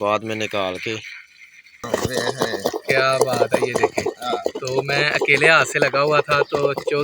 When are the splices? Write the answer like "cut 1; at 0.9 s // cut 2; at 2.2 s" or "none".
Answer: cut 1; at 1.9 s